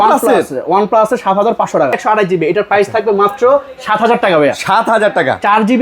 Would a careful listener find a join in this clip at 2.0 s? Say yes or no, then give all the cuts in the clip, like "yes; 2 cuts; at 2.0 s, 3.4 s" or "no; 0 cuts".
yes; 1 cut; at 2.0 s